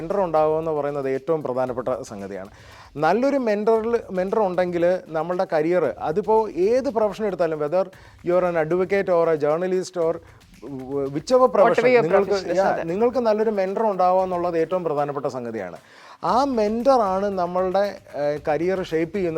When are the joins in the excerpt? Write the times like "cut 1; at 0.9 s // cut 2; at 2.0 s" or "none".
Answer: none